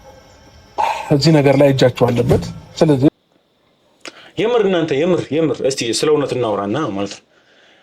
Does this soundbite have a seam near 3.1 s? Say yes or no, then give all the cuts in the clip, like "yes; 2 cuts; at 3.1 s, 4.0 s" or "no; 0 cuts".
yes; 1 cut; at 3.1 s